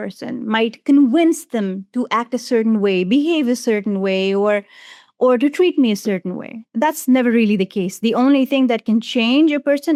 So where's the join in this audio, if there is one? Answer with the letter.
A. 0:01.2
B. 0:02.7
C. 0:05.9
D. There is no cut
D